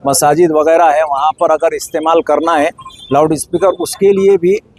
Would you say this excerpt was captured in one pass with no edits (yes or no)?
yes